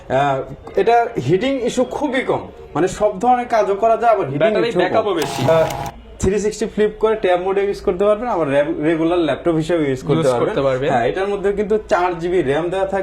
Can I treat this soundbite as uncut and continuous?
no; 1 cut; at 5.5 s

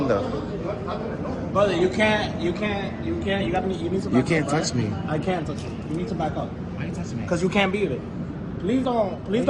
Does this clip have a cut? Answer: no; 0 cuts

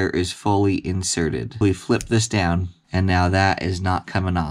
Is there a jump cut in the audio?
yes; 2 cuts; at 1.6 s, 2.8 s

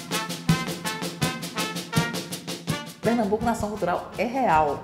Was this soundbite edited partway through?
yes; 1 cut; at 2.9 s

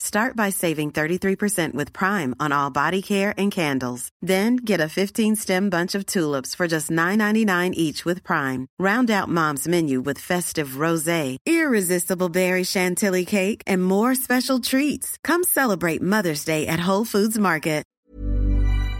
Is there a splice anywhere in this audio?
yes; 1 cut; at 18.0 s

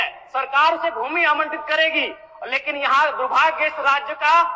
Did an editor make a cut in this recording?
no; 0 cuts

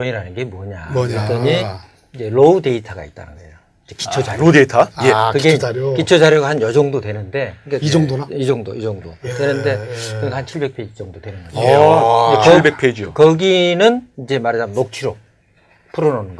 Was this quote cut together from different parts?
no; 0 cuts

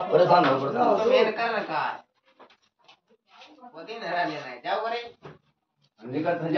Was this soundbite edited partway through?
no; 0 cuts

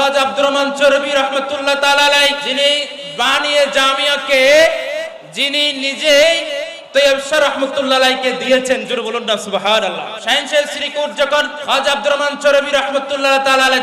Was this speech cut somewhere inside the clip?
yes; 3 cuts; at 2.4 s, 10.1 s, 11.6 s

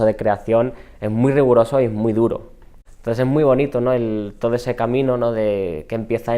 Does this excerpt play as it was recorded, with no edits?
no; 1 cut; at 3.0 s

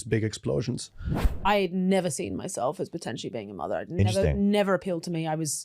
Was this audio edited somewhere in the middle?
yes; 1 cut; at 1.2 s

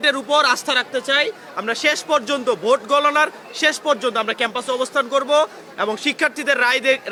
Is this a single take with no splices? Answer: yes; 0 cuts

